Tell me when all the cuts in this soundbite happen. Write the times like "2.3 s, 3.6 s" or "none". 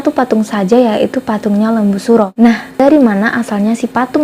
2.8 s

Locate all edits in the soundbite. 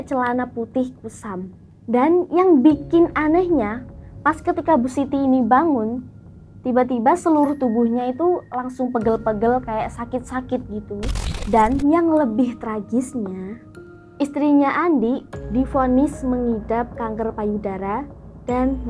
11.4 s

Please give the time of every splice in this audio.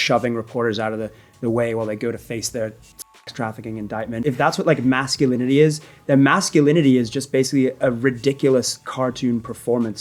4.2 s

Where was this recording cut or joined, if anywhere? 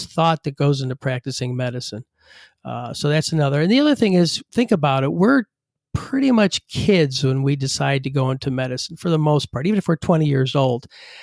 none

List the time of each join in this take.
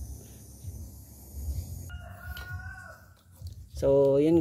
1.9 s

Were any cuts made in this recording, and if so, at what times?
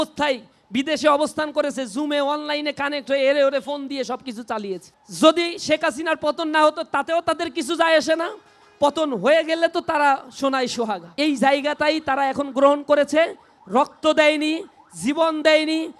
5.0 s, 11.0 s

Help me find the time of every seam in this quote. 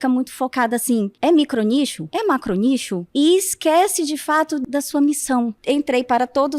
1.1 s, 2.0 s, 3.0 s, 4.6 s, 5.6 s

